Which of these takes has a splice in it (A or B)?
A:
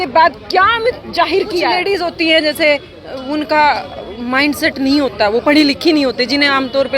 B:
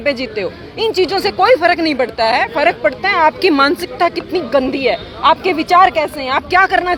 A